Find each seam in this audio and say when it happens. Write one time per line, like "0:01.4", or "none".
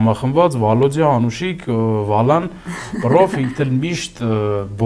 none